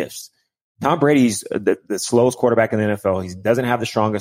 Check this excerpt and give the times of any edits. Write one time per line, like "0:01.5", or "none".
none